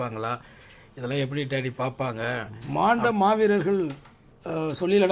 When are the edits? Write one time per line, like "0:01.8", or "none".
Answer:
0:02.6